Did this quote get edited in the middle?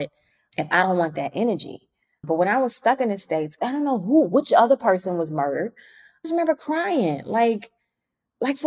yes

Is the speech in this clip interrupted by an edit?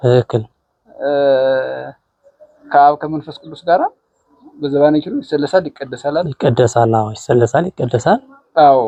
no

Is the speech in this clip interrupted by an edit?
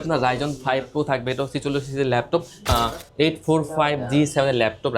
yes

